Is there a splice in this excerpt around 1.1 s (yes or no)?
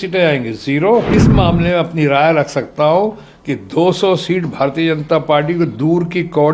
yes